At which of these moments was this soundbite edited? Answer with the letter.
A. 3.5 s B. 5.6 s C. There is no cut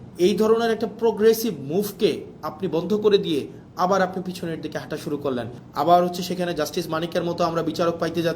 B